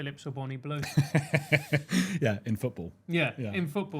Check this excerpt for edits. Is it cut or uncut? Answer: uncut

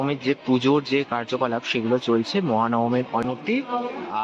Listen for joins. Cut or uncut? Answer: cut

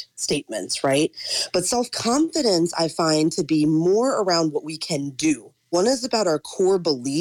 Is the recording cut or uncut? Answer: cut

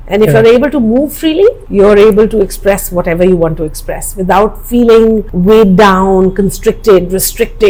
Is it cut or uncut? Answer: uncut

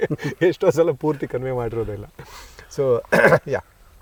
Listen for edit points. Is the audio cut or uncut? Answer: uncut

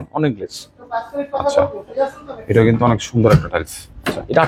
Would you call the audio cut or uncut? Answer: uncut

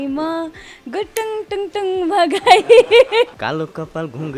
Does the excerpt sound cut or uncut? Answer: cut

